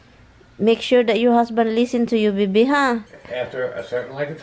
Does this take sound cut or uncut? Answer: cut